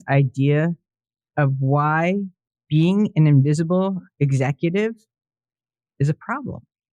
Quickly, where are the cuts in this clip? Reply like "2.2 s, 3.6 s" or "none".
none